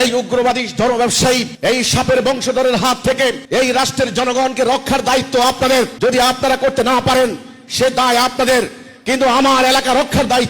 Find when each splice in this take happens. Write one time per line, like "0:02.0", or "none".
0:01.5
0:03.4
0:05.9